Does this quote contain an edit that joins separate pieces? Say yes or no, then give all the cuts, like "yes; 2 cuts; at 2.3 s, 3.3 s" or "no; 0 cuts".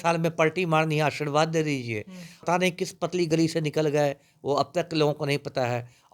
yes; 1 cut; at 2.3 s